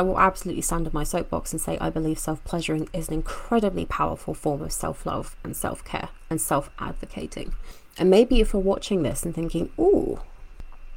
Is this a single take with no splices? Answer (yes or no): yes